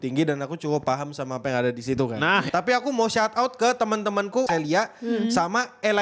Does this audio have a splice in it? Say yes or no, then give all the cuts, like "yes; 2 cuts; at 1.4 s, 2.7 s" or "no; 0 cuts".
yes; 2 cuts; at 2.5 s, 4.5 s